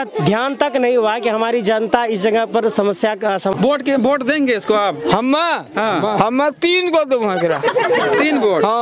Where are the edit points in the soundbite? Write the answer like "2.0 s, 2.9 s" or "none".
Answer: 3.5 s